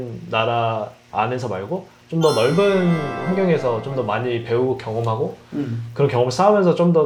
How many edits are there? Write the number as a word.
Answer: zero